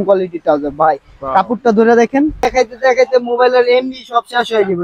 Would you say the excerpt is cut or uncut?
cut